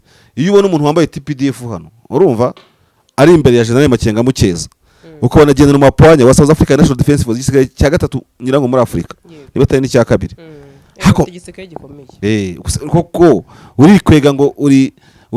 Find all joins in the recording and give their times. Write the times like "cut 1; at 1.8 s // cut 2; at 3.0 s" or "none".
none